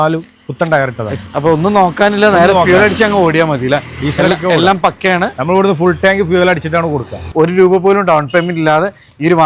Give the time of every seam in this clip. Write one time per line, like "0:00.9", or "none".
0:07.3